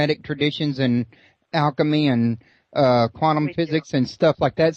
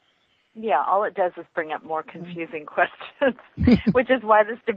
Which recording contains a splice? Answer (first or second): first